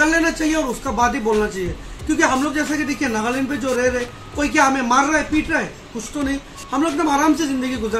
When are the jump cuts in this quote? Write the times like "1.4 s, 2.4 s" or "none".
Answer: none